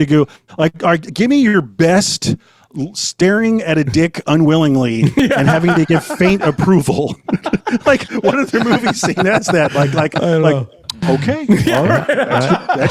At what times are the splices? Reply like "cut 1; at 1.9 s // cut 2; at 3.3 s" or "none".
none